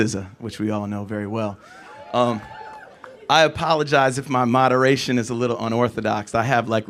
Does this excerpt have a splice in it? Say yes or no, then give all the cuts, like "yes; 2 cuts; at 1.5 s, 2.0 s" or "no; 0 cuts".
no; 0 cuts